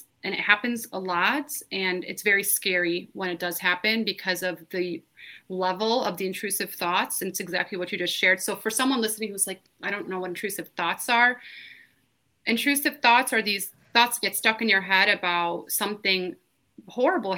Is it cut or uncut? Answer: uncut